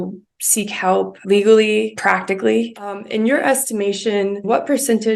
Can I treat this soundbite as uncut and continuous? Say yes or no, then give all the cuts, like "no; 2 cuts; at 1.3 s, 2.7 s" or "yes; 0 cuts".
no; 4 cuts; at 1.2 s, 2.0 s, 3.0 s, 4.5 s